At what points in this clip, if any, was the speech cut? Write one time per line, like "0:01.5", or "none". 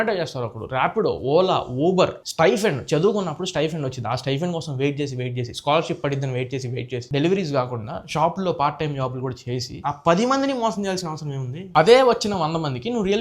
0:06.9
0:09.7